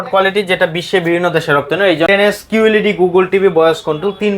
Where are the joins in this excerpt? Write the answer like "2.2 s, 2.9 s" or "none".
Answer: 2.1 s